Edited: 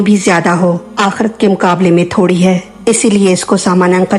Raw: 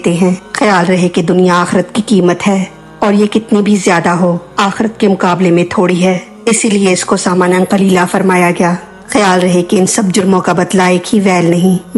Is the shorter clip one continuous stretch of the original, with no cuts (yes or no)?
yes